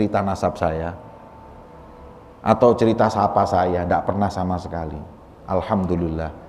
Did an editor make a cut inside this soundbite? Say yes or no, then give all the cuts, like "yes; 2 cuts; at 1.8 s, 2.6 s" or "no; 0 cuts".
no; 0 cuts